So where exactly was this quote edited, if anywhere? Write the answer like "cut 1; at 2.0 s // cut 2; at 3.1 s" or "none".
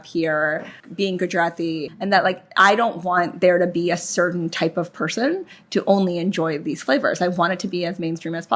cut 1; at 1.9 s